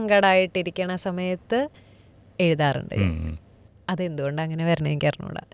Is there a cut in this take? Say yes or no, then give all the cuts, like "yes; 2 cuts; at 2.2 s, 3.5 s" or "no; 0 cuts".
no; 0 cuts